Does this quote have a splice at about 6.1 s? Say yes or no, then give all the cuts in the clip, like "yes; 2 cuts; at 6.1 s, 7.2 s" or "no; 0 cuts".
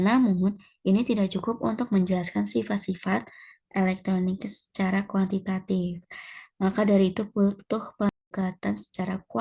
no; 1 cut; at 8.1 s